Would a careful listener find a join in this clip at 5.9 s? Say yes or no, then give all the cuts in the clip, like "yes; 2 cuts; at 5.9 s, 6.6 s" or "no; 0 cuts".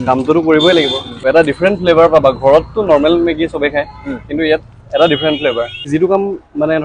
yes; 2 cuts; at 1.2 s, 5.9 s